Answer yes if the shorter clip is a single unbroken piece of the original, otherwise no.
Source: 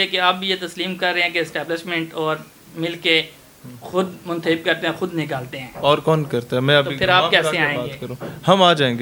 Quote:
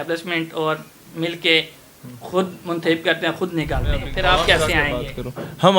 no